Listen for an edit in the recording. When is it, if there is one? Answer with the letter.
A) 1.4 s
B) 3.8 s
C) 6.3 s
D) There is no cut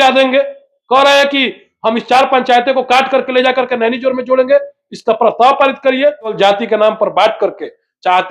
C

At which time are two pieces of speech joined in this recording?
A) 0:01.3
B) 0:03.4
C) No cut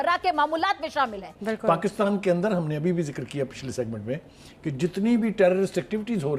A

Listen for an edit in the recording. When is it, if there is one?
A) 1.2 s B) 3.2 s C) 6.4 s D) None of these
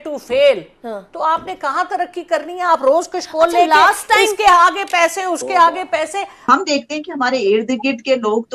C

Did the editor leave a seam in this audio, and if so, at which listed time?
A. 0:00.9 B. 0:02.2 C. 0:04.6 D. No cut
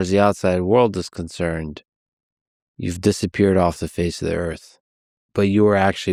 D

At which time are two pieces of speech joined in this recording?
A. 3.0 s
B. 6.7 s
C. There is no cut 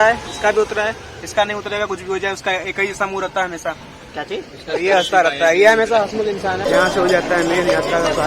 B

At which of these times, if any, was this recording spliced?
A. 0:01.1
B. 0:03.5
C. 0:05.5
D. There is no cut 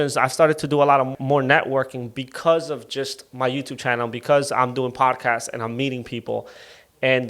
A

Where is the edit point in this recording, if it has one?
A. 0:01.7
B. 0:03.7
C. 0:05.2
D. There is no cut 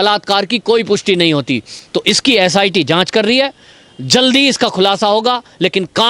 A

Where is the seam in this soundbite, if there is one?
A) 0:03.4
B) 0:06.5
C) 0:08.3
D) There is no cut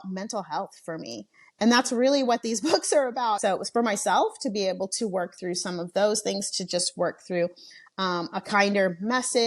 A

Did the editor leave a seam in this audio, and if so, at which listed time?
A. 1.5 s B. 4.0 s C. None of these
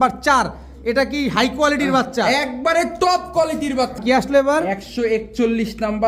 B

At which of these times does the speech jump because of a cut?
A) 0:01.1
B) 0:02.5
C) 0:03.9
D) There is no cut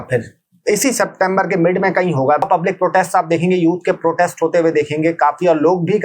B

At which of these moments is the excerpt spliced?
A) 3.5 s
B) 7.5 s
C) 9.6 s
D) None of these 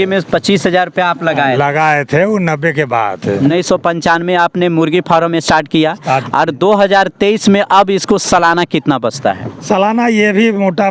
A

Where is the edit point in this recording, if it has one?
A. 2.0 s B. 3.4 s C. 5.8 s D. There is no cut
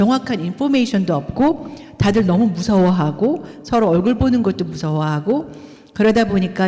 D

